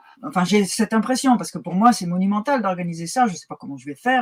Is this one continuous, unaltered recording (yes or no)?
yes